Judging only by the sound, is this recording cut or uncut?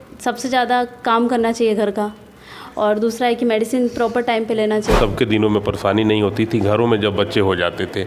cut